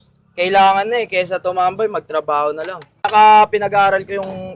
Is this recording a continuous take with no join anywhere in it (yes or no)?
no